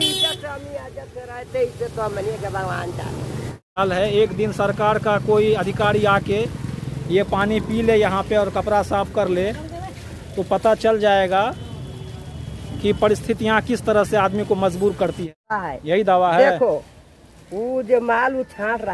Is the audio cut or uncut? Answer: cut